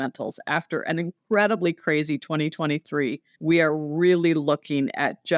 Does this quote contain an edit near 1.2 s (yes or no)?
yes